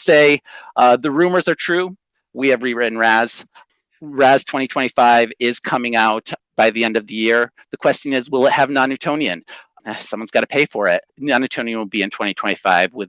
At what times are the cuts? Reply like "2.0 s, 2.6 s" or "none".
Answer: 3.6 s, 6.3 s, 9.7 s, 11.1 s

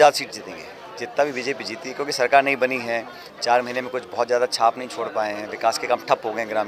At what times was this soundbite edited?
none

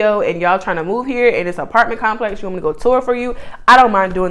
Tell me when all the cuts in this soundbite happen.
none

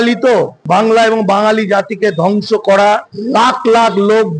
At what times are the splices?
none

